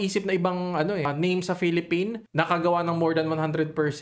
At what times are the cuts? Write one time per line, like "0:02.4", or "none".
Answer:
0:01.1
0:02.3